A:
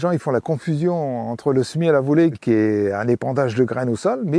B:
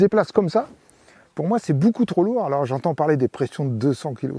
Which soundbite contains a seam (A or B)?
A